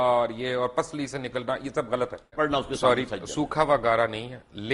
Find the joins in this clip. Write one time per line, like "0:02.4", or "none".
0:02.3

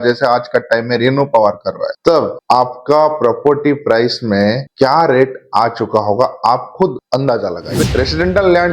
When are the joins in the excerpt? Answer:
0:07.8

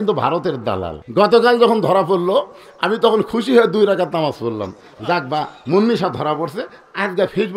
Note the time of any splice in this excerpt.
0:01.0

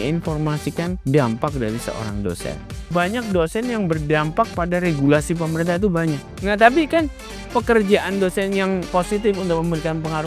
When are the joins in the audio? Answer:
0:01.0
0:02.9
0:06.3
0:08.9

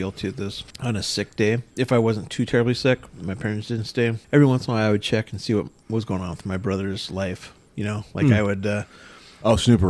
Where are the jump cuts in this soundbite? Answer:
none

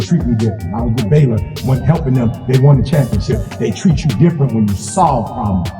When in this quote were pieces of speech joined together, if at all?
none

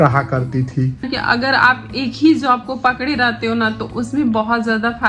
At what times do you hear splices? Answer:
0:01.1

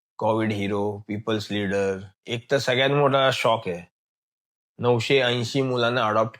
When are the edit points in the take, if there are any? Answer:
0:02.1

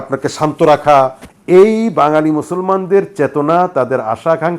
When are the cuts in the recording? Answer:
0:01.3

